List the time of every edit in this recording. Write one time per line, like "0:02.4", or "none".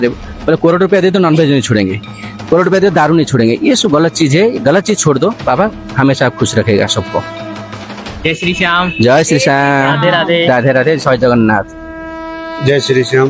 none